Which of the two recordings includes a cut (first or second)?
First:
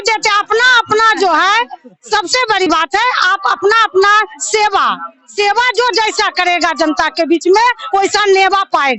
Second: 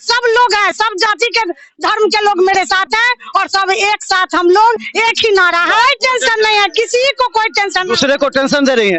second